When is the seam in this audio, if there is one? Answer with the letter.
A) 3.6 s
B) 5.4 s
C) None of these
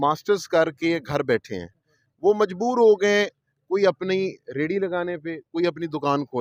C